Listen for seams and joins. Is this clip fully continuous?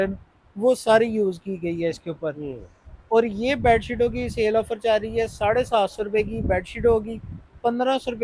yes; 0 cuts

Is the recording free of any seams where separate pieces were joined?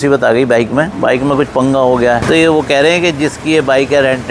no; 1 cut; at 2.2 s

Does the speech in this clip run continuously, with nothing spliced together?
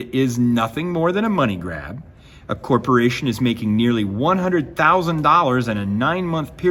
yes; 0 cuts

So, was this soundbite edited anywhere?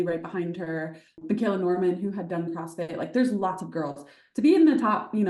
yes; 1 cut; at 1.2 s

